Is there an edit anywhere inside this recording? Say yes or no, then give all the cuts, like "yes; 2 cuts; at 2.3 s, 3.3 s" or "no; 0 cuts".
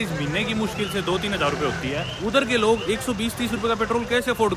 yes; 2 cuts; at 2.1 s, 2.8 s